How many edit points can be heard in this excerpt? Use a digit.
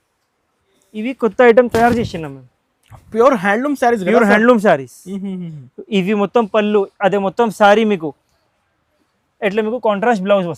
0